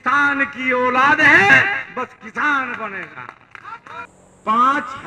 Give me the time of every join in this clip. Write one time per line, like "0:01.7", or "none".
0:04.1